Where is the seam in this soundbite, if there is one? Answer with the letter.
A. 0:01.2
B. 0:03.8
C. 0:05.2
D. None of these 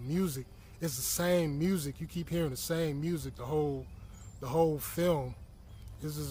D